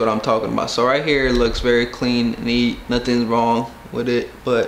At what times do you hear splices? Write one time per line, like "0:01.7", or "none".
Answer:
none